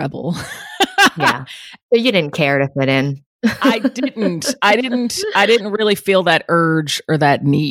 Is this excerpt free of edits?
yes; 0 cuts

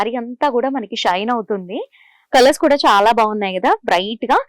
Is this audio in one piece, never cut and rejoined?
no; 1 cut; at 2.1 s

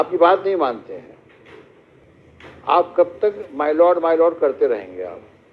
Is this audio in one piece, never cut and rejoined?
no; 1 cut; at 2.0 s

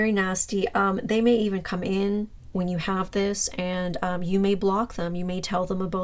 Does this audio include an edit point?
no; 0 cuts

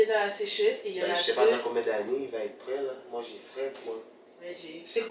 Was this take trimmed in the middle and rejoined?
no; 0 cuts

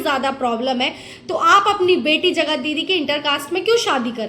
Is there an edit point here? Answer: no; 0 cuts

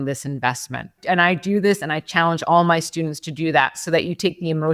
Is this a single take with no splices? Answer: yes; 0 cuts

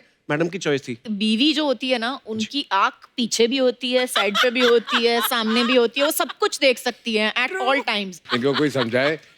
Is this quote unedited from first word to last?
no; 2 cuts; at 1.0 s, 8.2 s

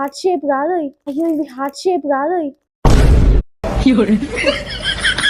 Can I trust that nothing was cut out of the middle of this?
yes; 0 cuts

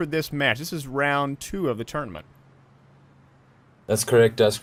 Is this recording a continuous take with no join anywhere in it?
yes; 0 cuts

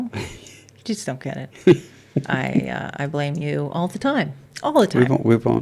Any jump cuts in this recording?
yes; 2 cuts; at 2.6 s, 4.4 s

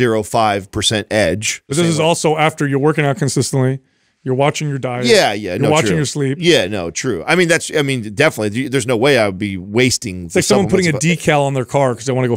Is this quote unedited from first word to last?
no; 1 cut; at 1.7 s

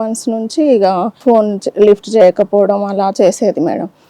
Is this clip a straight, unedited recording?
no; 1 cut; at 1.2 s

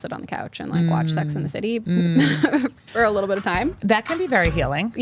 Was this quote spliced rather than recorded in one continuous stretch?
no; 0 cuts

